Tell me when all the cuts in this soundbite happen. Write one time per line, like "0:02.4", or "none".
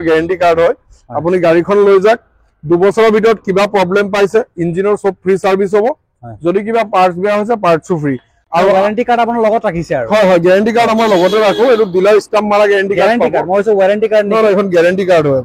none